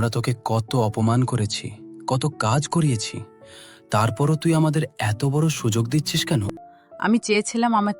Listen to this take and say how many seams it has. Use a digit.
1